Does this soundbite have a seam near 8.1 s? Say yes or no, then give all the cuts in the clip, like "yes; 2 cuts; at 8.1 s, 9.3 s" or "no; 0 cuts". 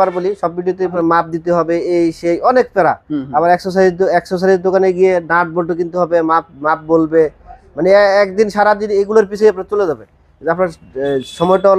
no; 1 cut; at 0.9 s